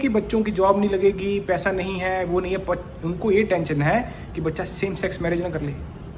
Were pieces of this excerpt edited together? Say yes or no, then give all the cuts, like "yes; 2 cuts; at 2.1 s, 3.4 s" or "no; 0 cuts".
no; 0 cuts